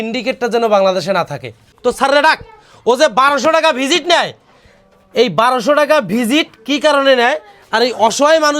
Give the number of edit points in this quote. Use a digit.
1